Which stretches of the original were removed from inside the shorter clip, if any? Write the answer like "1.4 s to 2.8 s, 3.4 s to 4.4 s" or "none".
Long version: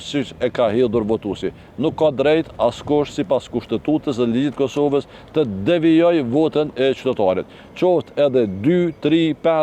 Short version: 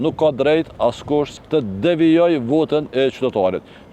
3.2 s to 5.2 s

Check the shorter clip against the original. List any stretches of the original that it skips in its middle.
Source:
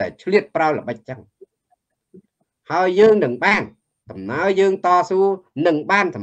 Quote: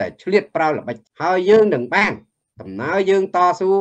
1.0 s to 2.5 s

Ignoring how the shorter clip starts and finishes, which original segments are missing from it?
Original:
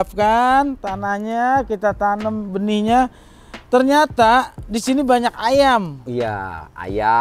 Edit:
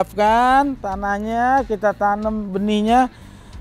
none

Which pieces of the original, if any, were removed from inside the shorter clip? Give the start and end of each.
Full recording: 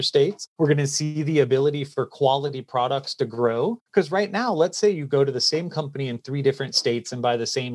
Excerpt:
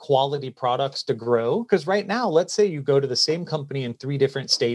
3.8 s to 3.9 s

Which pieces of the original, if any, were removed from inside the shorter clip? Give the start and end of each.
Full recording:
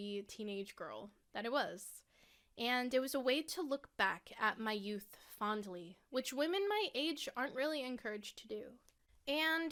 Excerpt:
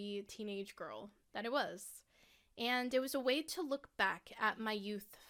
none

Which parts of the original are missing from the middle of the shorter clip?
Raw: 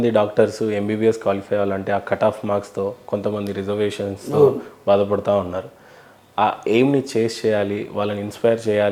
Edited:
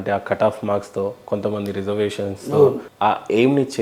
4.7 s to 6.2 s

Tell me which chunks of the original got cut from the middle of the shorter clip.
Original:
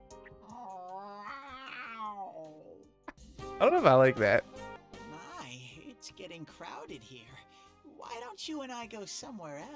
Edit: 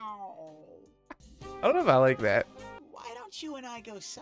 4.8 s to 7.9 s

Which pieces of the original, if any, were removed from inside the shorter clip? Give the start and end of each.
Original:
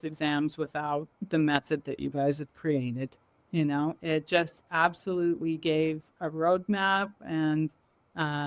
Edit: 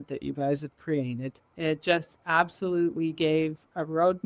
3.3 s to 4.0 s

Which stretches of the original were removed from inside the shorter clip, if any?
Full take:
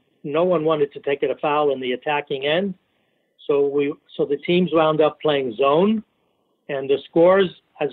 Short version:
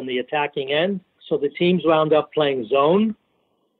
2.9 s to 4.0 s

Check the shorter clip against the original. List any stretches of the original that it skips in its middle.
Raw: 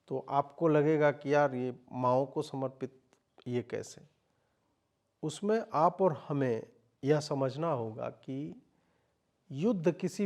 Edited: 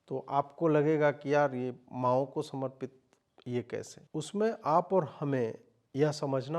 4.0 s to 5.1 s

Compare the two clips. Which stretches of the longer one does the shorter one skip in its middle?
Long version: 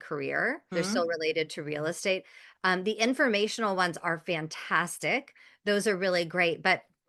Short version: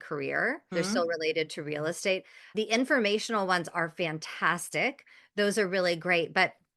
2.5 s to 2.8 s

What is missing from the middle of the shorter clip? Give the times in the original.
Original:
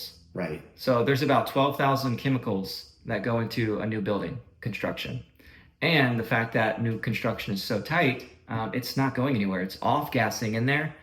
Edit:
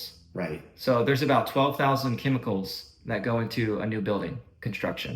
none

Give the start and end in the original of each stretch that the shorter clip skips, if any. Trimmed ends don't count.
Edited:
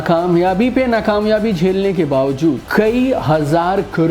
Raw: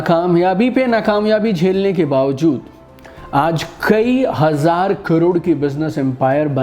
2.6 s to 3.8 s

